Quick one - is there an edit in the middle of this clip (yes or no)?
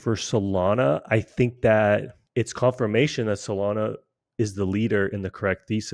yes